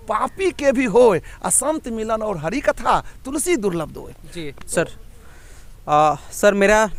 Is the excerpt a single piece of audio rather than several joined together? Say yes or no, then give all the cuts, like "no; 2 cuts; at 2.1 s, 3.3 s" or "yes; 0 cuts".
yes; 0 cuts